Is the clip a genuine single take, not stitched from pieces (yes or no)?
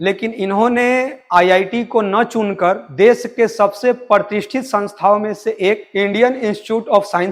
yes